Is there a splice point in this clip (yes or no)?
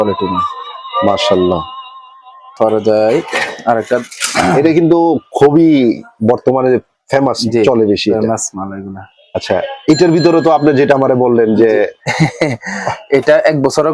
yes